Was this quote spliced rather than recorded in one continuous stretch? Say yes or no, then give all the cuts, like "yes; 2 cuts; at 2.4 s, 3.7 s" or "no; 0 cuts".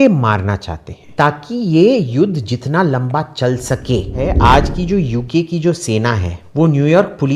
yes; 3 cuts; at 1.0 s, 4.1 s, 6.3 s